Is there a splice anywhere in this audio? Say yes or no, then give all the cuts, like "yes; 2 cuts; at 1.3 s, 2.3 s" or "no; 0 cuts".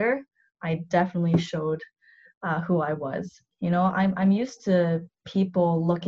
yes; 1 cut; at 3.4 s